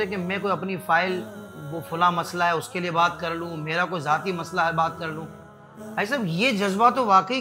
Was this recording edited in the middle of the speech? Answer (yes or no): no